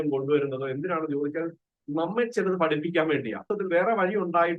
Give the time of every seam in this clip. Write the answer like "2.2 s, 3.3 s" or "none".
3.5 s